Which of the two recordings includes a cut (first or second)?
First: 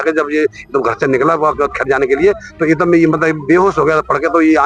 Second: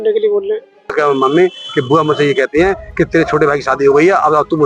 second